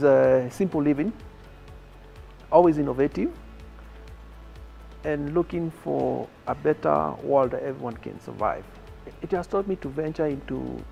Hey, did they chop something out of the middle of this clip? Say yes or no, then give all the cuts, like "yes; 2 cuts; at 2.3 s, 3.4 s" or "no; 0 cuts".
no; 0 cuts